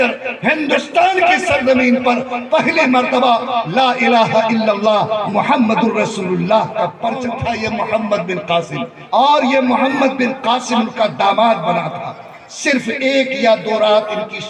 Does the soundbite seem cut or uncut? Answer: cut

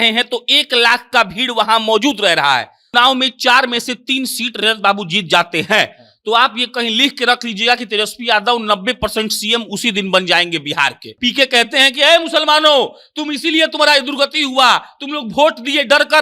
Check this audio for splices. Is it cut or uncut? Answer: cut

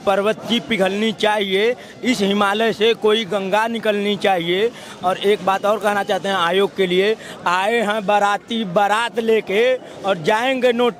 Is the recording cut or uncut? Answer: uncut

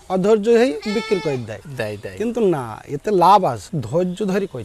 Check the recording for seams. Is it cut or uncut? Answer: cut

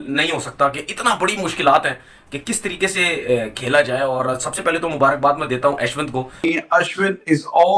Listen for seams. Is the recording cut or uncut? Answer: cut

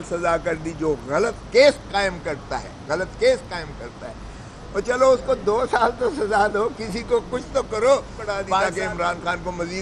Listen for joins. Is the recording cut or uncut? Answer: cut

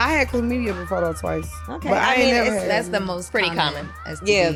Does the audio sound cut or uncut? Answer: uncut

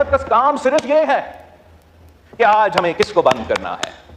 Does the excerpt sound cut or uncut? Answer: uncut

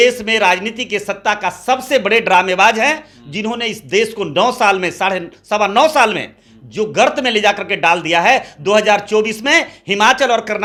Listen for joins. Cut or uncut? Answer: uncut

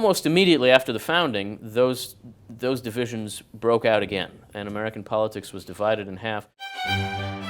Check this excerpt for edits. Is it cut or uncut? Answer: cut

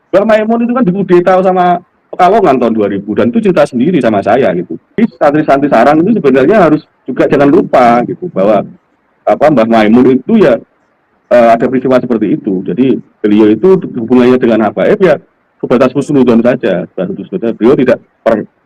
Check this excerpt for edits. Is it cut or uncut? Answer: cut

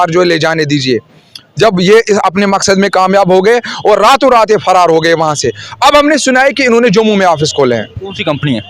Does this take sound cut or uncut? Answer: uncut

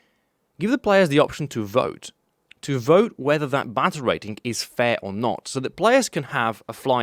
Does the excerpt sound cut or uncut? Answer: uncut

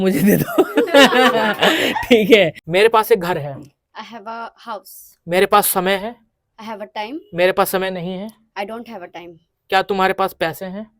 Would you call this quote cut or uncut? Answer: cut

